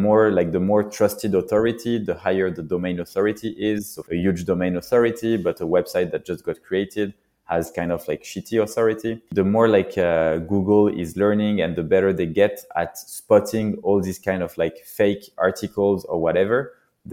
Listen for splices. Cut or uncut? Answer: cut